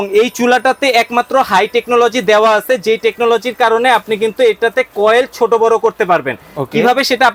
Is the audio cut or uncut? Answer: uncut